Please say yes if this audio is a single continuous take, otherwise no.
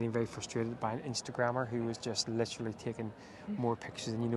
yes